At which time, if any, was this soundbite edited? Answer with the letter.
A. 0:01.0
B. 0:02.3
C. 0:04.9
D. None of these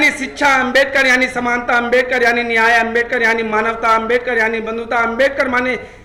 D